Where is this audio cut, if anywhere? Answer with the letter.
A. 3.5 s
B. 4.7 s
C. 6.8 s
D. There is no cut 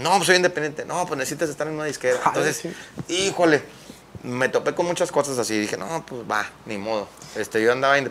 D